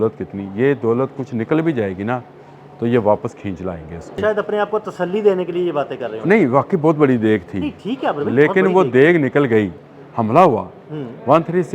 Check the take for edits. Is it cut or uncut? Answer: cut